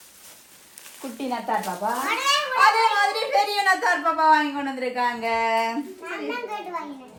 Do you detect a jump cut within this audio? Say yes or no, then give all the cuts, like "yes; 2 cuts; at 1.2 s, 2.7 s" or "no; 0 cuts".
no; 0 cuts